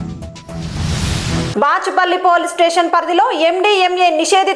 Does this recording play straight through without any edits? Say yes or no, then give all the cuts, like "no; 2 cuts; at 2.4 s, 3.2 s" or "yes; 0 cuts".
no; 1 cut; at 1.5 s